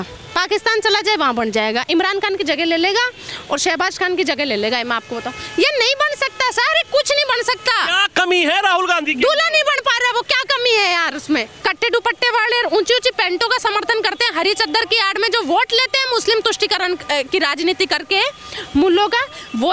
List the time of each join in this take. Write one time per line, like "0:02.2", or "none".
0:11.5